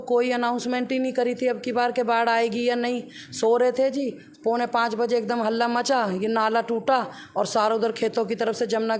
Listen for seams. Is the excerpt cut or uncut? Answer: uncut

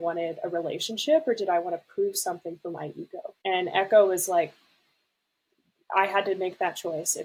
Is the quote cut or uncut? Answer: uncut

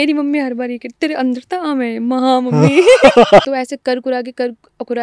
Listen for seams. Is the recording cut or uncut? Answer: cut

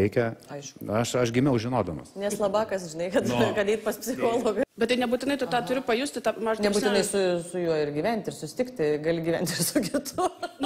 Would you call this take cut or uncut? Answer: cut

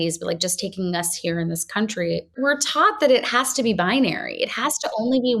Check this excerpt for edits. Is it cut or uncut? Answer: cut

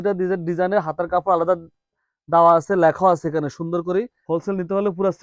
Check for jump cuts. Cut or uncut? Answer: cut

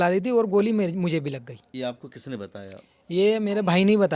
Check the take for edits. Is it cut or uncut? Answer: cut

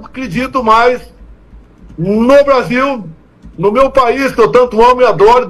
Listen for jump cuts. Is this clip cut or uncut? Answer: uncut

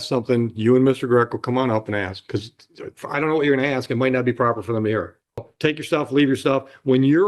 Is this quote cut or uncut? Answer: cut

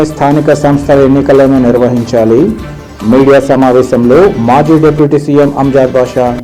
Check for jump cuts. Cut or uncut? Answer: uncut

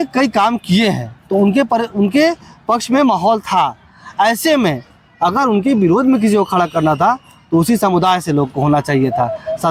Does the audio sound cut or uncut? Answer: uncut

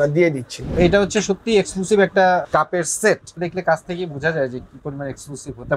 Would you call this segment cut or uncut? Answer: cut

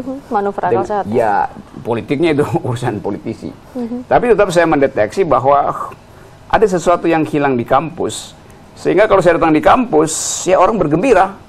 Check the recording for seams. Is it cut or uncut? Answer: uncut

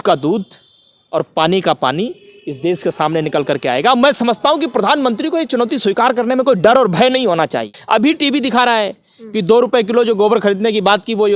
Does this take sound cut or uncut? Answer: cut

